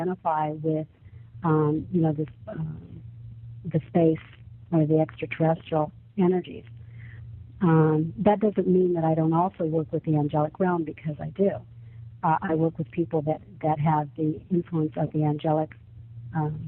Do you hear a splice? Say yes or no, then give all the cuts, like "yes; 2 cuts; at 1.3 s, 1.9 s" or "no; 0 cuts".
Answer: yes; 1 cut; at 7.8 s